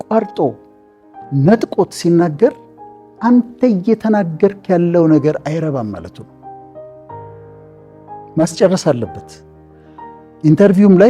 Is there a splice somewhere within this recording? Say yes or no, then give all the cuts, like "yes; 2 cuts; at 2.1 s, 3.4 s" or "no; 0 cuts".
no; 0 cuts